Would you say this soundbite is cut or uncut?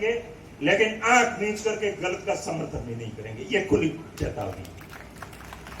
uncut